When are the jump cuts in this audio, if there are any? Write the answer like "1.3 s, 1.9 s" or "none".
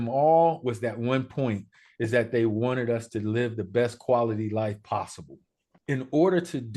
5.7 s